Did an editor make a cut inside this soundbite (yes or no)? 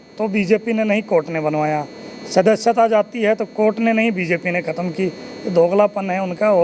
no